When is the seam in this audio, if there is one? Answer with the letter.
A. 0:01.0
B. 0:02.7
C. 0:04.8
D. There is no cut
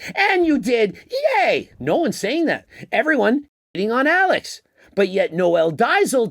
B